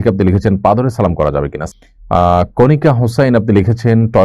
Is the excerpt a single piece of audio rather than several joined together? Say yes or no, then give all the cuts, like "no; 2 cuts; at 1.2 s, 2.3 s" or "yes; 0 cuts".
no; 1 cut; at 1.6 s